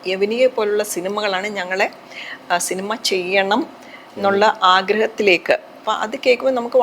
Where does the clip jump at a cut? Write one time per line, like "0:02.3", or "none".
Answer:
0:05.8